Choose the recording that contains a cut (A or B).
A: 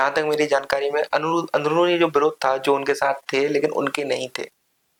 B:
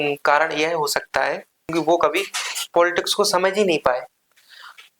B